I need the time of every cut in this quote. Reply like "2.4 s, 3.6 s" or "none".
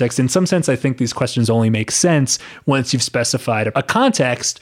3.7 s